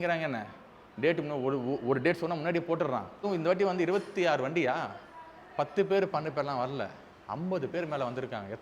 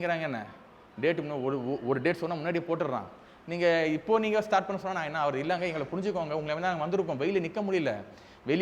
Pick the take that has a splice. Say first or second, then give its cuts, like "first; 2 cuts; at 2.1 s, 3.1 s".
first; 1 cut; at 3.2 s